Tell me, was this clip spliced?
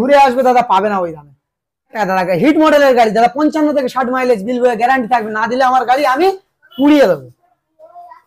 yes; 1 cut; at 2.0 s

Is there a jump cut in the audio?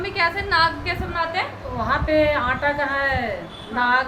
no; 0 cuts

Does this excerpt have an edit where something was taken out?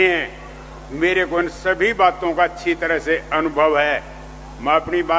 no; 0 cuts

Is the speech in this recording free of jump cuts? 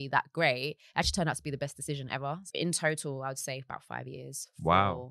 no; 1 cut; at 2.4 s

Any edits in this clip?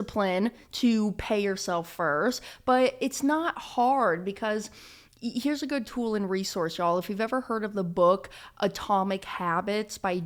no; 0 cuts

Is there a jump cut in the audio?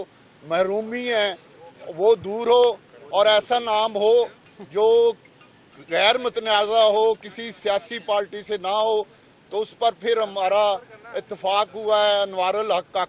no; 0 cuts

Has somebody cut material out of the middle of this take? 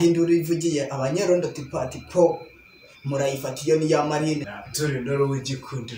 yes; 1 cut; at 4.5 s

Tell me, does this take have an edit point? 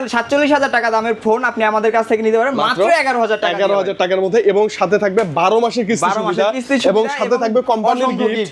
no; 0 cuts

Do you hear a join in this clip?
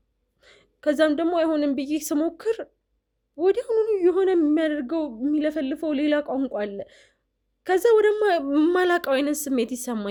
no; 0 cuts

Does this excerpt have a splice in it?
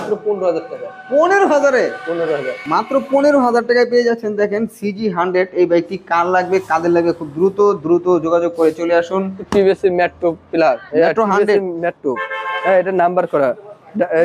no; 0 cuts

